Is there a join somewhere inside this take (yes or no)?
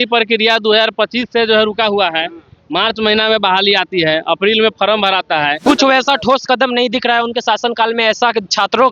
yes